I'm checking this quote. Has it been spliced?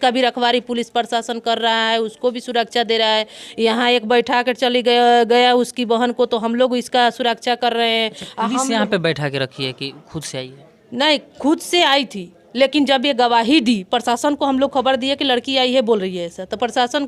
no; 0 cuts

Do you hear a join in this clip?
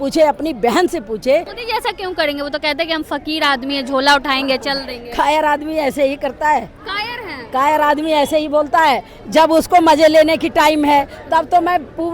yes; 1 cut; at 1.6 s

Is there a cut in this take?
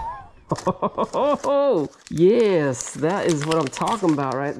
no; 0 cuts

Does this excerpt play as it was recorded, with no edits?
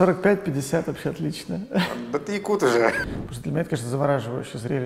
no; 1 cut; at 3.0 s

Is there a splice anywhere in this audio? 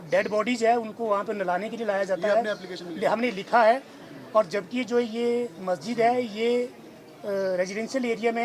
no; 0 cuts

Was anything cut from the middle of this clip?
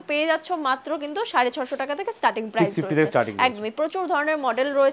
no; 0 cuts

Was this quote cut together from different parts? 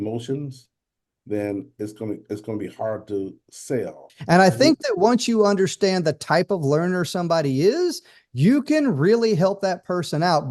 yes; 1 cut; at 4.1 s

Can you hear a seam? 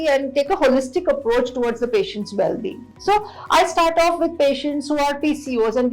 no; 0 cuts

